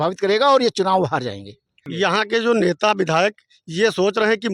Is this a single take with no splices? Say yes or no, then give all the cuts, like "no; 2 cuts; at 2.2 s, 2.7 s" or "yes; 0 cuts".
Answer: no; 1 cut; at 1.8 s